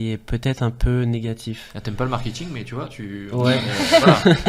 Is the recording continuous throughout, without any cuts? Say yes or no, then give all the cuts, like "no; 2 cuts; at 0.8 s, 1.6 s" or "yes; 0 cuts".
yes; 0 cuts